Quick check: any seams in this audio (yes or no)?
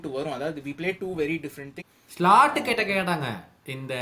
yes